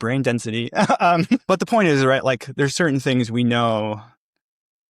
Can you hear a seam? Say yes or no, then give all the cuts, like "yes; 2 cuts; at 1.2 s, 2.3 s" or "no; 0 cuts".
yes; 1 cut; at 1.4 s